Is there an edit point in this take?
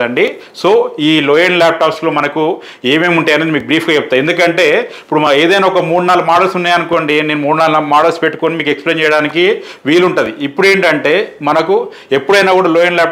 no; 0 cuts

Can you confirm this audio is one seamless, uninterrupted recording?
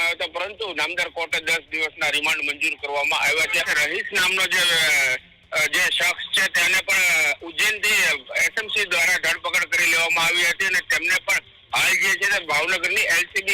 no; 1 cut; at 3.7 s

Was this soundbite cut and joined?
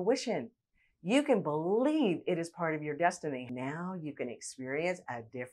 yes; 1 cut; at 3.5 s

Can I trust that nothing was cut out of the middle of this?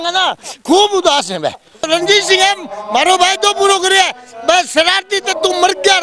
no; 1 cut; at 1.9 s

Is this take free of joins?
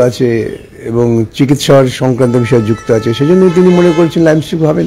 yes; 0 cuts

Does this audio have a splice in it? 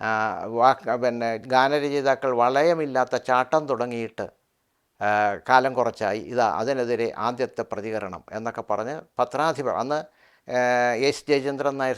no; 0 cuts

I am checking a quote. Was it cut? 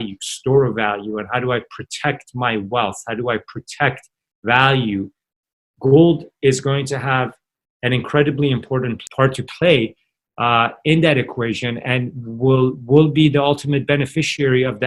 yes; 1 cut; at 9.0 s

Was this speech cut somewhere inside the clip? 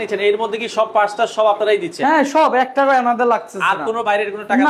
no; 0 cuts

